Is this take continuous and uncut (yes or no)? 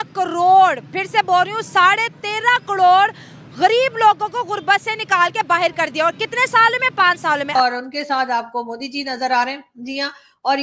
no